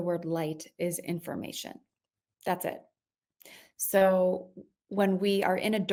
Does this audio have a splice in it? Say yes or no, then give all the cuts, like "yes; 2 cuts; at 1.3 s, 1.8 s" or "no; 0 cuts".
no; 0 cuts